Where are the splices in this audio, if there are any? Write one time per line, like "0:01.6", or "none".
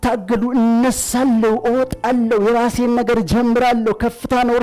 none